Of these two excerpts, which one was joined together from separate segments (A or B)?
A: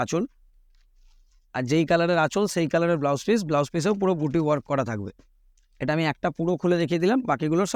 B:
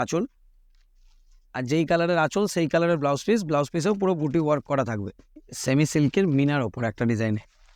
B